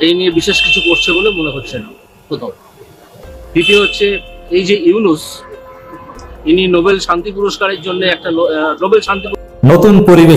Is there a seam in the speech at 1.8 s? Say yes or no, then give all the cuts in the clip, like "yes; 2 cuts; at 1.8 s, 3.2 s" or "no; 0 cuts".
no; 1 cut; at 9.4 s